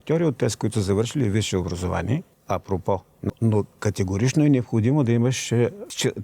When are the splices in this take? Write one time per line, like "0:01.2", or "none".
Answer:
0:02.3
0:03.3